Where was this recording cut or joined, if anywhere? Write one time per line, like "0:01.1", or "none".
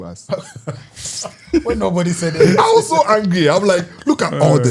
none